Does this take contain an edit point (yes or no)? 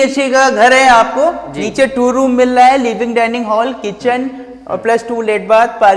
no